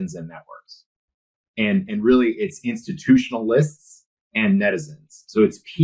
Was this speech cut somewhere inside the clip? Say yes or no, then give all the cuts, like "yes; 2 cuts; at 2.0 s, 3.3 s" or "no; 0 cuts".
no; 0 cuts